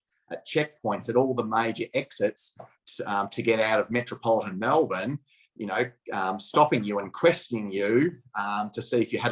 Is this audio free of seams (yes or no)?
yes